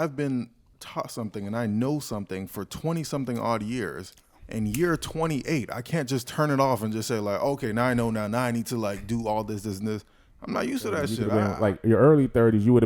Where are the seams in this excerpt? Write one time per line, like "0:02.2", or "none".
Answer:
0:11.2

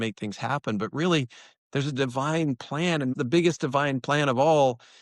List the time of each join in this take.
0:03.1

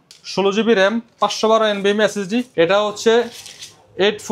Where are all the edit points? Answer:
0:02.5

